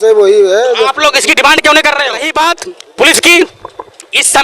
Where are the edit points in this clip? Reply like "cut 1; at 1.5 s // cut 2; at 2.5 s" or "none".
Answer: cut 1; at 2.2 s